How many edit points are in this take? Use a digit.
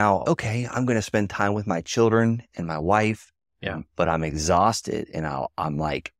0